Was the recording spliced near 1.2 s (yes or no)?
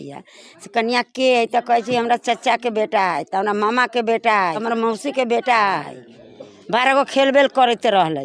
no